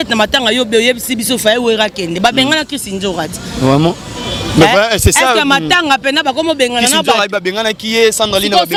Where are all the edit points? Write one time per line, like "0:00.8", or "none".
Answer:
none